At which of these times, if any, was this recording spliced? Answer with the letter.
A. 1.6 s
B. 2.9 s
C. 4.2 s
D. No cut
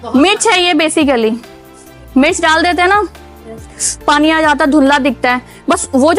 D